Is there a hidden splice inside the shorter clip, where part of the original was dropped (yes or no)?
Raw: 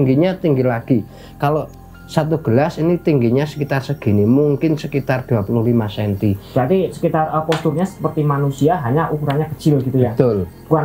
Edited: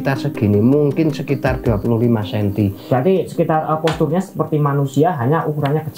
no